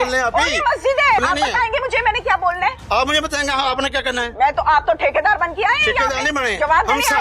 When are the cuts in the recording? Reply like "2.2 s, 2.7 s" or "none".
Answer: 1.2 s